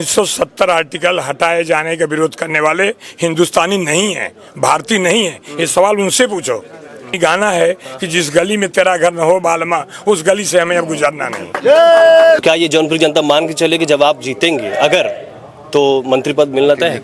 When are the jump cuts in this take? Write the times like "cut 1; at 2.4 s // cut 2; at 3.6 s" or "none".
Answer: cut 1; at 7.1 s // cut 2; at 12.4 s